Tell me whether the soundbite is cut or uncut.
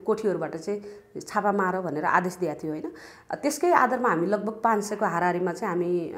uncut